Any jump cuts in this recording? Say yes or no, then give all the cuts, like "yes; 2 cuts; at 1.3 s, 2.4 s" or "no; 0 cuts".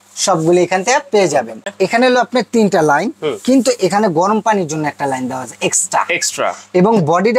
yes; 1 cut; at 1.6 s